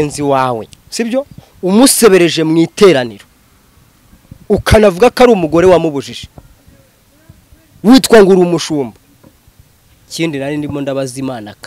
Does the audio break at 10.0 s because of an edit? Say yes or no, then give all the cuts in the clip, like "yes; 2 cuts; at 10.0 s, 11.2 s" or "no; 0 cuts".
yes; 1 cut; at 10.0 s